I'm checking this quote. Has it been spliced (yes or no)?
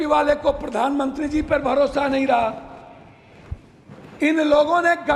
no